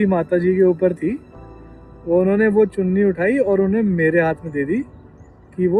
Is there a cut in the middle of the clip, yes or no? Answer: no